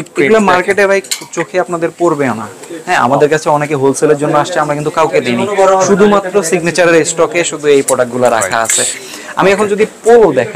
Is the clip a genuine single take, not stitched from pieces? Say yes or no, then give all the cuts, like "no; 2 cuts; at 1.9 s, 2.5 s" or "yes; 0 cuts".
yes; 0 cuts